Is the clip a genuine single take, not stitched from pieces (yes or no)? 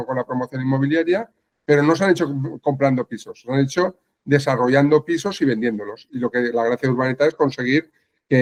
yes